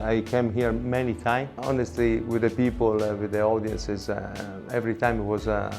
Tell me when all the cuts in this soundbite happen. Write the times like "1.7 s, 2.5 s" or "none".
1.5 s